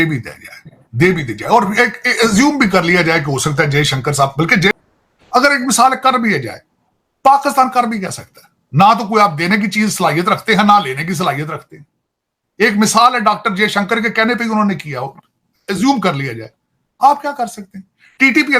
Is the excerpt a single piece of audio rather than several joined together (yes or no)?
no